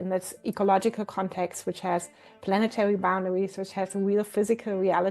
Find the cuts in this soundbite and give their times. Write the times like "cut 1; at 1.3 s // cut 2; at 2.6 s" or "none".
none